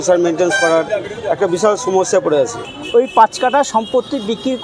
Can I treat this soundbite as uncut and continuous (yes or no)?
no